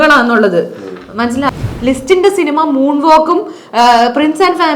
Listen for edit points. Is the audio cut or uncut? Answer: cut